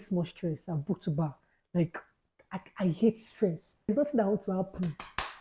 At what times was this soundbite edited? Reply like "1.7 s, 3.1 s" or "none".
3.9 s